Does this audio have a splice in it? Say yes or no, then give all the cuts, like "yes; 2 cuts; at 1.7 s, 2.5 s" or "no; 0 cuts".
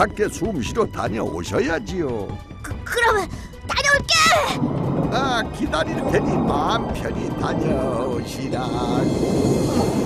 yes; 1 cut; at 4.9 s